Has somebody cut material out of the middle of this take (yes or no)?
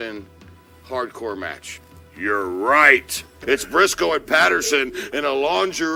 no